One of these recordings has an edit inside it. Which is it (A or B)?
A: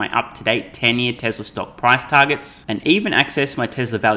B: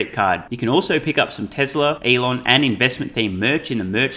B